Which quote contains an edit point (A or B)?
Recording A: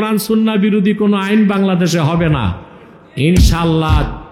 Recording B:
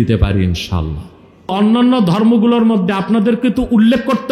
B